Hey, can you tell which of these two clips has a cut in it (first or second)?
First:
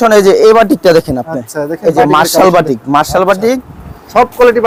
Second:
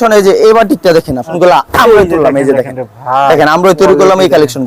second